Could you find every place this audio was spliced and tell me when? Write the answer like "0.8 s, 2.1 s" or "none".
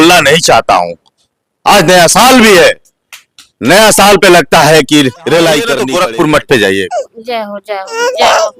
5.8 s